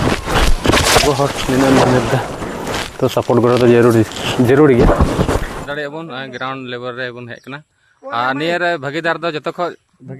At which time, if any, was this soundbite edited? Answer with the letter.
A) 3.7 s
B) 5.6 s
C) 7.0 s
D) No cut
B